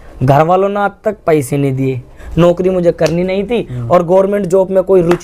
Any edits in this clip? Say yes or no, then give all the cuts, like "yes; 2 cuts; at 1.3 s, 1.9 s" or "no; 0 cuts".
yes; 1 cut; at 2.3 s